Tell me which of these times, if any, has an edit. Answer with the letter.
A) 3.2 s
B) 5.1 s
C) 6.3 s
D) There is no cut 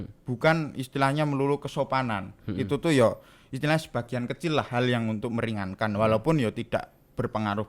D